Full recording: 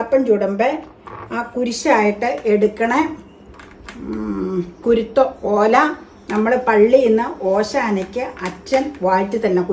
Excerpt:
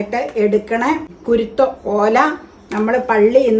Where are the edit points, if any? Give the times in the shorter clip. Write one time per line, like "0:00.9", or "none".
0:01.1